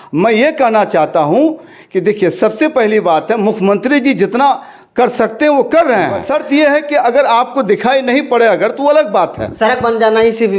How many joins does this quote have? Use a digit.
1